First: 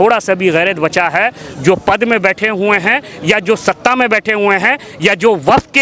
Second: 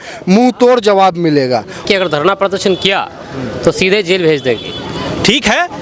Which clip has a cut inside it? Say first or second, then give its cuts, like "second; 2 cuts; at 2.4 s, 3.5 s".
second; 1 cut; at 1.8 s